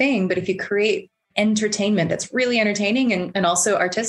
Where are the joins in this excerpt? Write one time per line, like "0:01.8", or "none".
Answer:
none